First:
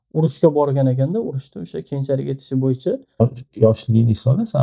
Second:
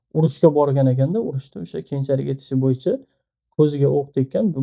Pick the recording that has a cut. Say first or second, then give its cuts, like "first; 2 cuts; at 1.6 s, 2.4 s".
first; 1 cut; at 3.2 s